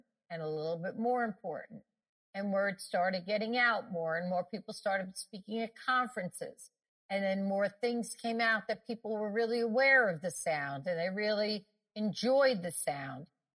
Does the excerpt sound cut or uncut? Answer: uncut